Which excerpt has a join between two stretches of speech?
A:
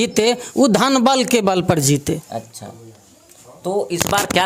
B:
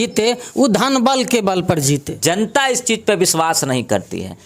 B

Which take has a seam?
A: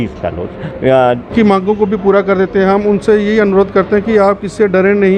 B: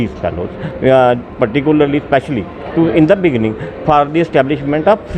A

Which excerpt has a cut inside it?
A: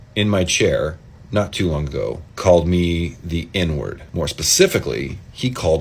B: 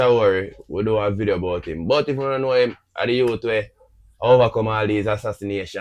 A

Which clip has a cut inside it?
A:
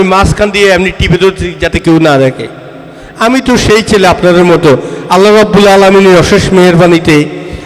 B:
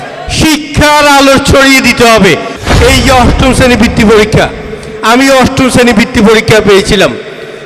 B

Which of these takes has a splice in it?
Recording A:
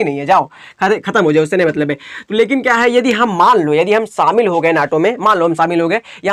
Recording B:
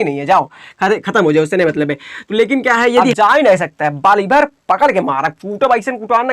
B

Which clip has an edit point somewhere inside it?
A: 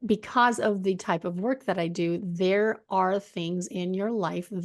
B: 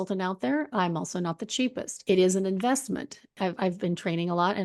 B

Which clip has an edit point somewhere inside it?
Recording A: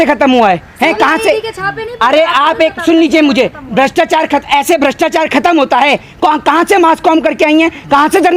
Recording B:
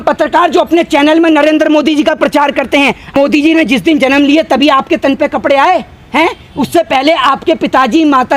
B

